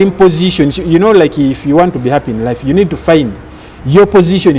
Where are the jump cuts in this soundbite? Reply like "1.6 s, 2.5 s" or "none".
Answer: none